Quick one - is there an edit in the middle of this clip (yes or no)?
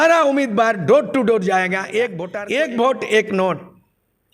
yes